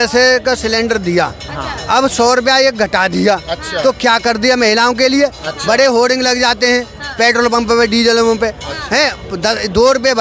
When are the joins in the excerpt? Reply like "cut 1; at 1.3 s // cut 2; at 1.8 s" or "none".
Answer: none